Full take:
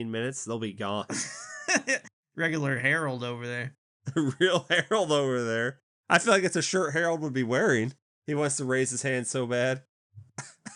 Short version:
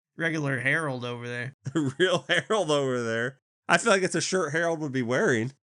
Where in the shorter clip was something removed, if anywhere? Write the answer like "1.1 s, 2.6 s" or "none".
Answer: 1.5 s